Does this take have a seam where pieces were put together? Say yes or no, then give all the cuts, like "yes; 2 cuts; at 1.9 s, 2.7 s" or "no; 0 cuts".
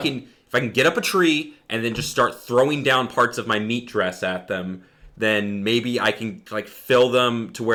no; 0 cuts